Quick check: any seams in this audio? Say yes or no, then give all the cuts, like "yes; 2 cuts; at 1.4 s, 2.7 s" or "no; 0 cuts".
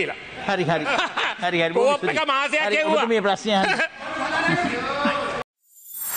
no; 0 cuts